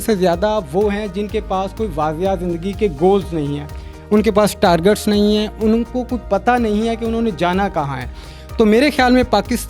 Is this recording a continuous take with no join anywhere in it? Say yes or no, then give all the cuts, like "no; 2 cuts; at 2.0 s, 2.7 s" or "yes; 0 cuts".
yes; 0 cuts